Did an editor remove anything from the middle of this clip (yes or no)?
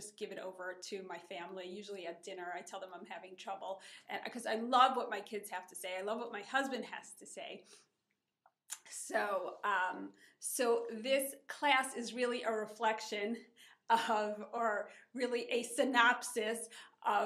yes